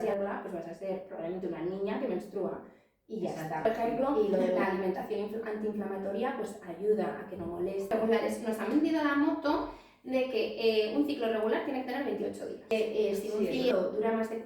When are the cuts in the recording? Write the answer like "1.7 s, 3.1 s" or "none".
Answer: 4.6 s, 7.9 s, 12.6 s